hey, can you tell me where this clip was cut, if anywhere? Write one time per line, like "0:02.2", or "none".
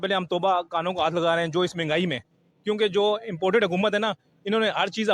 none